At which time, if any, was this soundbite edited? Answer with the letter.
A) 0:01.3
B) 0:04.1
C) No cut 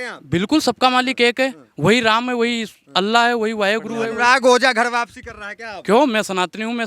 B